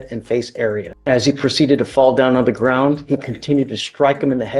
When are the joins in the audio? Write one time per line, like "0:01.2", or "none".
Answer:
0:00.9